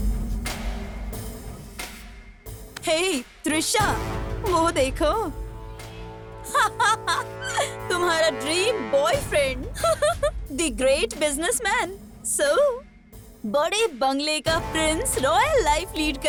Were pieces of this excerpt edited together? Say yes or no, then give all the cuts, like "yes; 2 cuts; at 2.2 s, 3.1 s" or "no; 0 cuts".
no; 0 cuts